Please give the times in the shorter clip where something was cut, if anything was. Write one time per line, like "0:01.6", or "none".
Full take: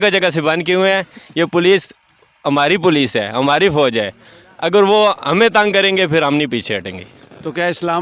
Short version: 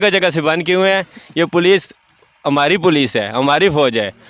none

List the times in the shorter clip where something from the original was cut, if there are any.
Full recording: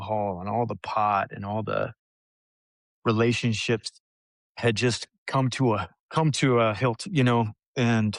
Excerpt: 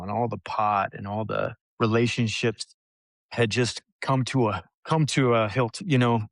0:01.6

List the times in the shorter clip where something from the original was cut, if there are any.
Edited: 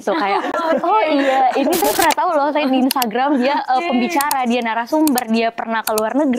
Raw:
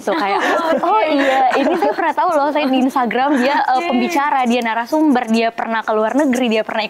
none

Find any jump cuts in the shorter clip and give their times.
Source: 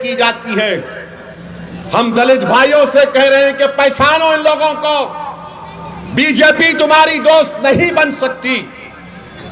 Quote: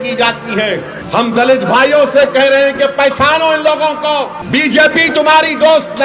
0:00.9
0:04.4

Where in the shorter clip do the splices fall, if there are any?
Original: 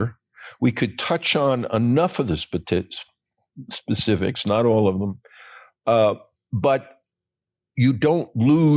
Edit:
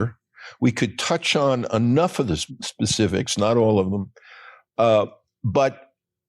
0:02.5

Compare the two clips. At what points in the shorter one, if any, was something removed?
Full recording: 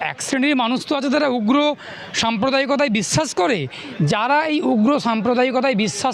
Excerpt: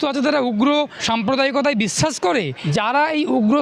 0:01.0
0:02.6

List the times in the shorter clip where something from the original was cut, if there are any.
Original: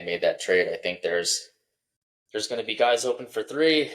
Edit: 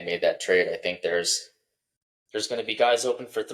none

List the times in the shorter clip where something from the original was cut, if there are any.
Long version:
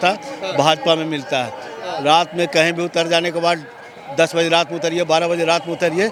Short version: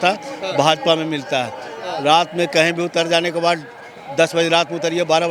none

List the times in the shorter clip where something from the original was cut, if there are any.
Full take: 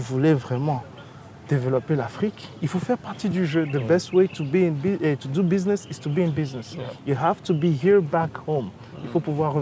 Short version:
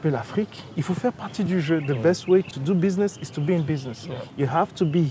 0:02.5

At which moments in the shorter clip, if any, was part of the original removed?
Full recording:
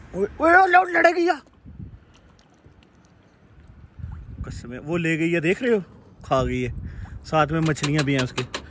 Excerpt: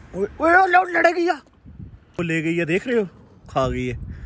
0:02.0

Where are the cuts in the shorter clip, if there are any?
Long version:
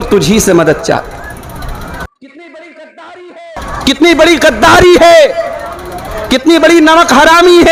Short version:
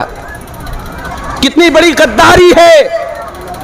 0:01.1

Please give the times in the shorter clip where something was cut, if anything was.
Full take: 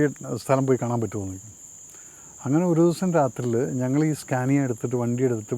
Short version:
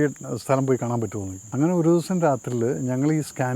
0:01.4

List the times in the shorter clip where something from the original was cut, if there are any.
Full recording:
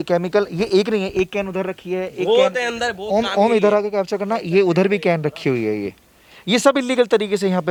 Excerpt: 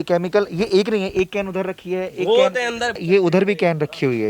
0:03.0

